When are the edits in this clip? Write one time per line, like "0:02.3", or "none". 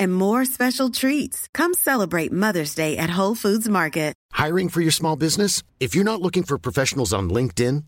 0:04.2